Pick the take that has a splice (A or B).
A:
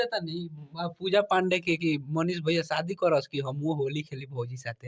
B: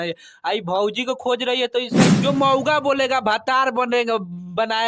B